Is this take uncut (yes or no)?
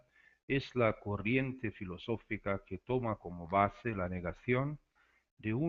yes